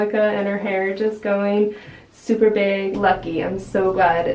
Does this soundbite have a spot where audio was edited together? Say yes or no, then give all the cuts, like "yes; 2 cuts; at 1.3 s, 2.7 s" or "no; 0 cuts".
yes; 1 cut; at 2.9 s